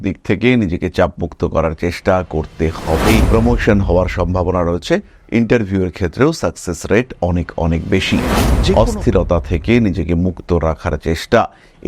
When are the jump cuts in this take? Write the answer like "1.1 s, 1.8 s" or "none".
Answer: 3.2 s, 8.7 s

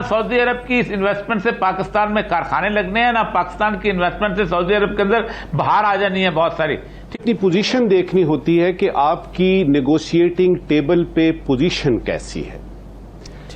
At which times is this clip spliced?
7.2 s

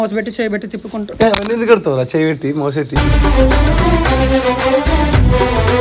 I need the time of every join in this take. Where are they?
none

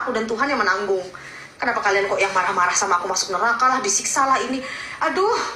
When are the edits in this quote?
none

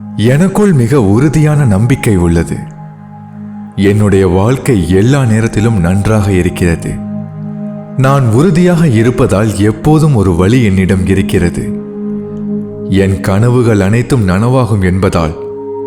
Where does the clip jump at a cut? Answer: 11.6 s, 12.9 s

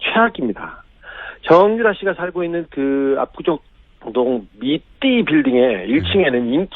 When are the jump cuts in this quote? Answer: 1.7 s

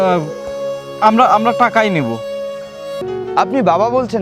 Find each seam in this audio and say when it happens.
3.0 s

